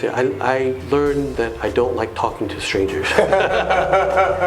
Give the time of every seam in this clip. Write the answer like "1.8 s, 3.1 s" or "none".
none